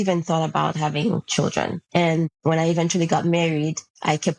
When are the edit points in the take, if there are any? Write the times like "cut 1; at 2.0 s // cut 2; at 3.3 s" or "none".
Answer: cut 1; at 1.8 s